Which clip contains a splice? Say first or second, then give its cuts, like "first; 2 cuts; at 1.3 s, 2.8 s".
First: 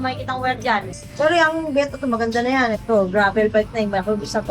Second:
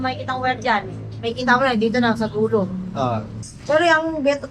first; 2 cuts; at 1.0 s, 2.8 s